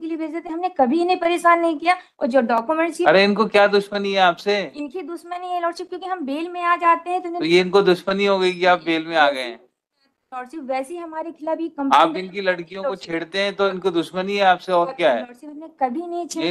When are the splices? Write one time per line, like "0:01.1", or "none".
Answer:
none